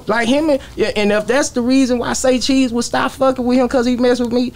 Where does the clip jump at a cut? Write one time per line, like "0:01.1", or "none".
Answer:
none

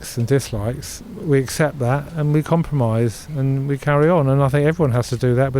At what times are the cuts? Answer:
0:00.9

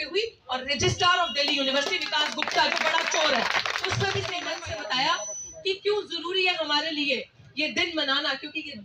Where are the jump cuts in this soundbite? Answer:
0:04.4

